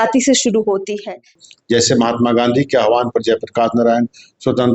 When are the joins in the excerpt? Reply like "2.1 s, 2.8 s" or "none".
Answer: 1.4 s